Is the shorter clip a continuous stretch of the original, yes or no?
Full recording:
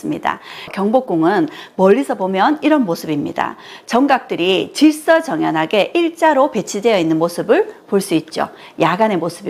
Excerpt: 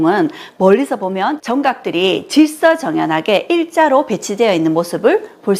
no